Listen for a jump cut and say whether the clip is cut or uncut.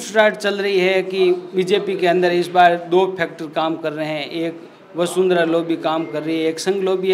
uncut